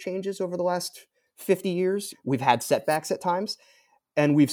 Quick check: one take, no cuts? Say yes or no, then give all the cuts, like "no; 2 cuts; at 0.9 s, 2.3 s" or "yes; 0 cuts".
no; 1 cut; at 2.1 s